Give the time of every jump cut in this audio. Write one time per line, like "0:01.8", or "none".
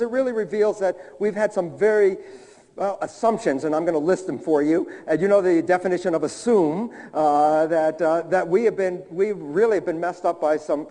0:05.0

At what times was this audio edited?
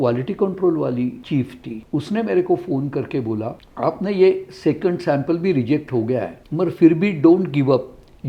0:01.4
0:03.6
0:06.4

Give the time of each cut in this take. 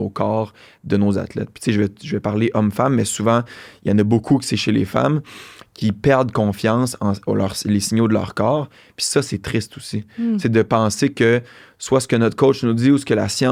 none

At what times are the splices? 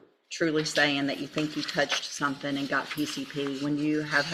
none

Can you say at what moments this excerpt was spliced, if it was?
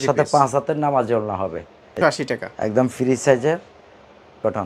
0:02.0

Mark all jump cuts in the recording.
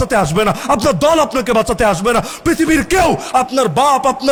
none

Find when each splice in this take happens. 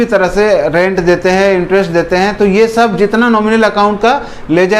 none

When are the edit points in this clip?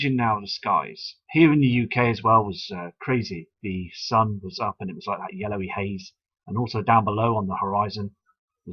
0:05.0

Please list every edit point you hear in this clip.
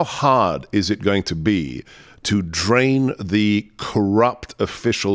none

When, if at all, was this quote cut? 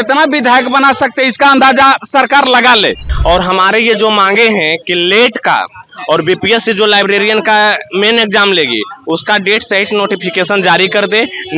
0:03.1

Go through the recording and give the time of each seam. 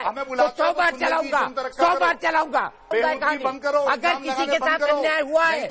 0:02.9

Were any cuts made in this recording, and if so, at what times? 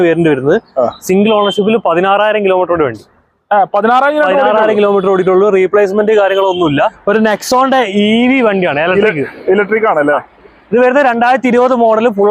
0:07.0

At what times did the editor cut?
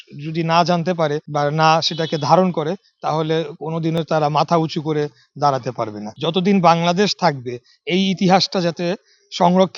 0:01.2
0:06.0

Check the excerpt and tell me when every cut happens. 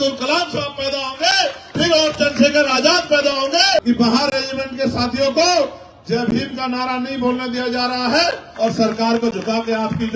0:03.8
0:08.5

